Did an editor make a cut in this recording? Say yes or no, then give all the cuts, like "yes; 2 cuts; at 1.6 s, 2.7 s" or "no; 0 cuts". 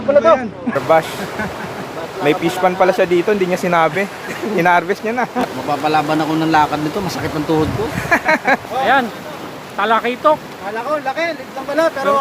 yes; 3 cuts; at 0.8 s, 5.5 s, 8.6 s